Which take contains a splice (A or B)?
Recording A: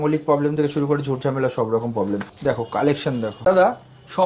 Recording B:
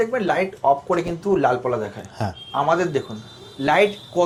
A